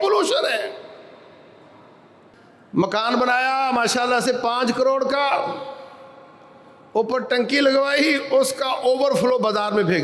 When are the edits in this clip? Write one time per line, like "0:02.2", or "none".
0:02.3